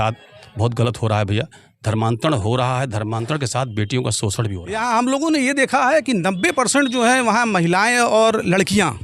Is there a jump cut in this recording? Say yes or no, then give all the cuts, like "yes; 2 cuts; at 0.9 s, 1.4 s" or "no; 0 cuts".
yes; 1 cut; at 4.7 s